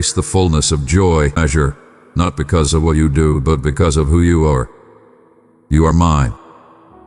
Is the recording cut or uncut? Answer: cut